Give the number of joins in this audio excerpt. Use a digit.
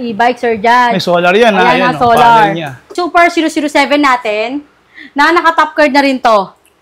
1